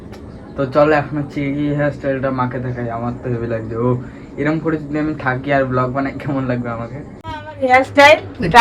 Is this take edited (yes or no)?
no